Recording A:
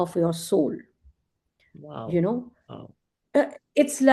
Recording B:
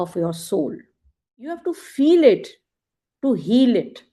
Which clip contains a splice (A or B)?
B